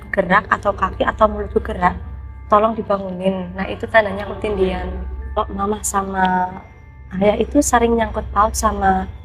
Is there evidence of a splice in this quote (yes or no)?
yes